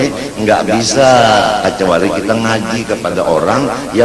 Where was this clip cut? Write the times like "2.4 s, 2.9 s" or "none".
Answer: none